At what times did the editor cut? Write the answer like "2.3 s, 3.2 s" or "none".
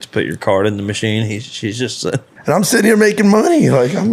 2.3 s